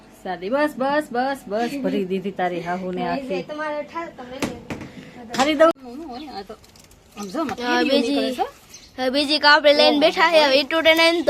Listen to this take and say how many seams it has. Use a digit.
1